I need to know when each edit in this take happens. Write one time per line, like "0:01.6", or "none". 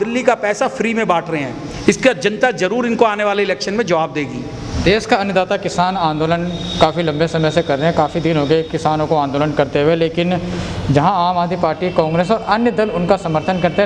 none